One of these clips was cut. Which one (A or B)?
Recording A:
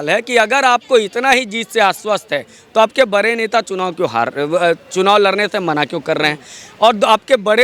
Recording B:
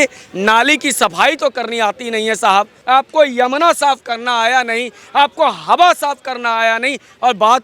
B